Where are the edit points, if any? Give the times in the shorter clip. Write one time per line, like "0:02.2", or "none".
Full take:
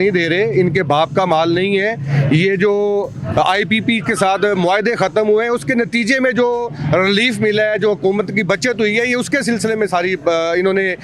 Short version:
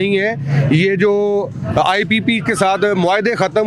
none